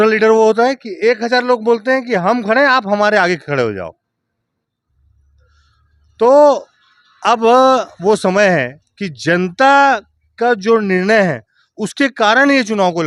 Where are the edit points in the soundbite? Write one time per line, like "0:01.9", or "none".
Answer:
none